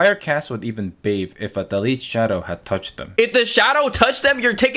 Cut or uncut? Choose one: cut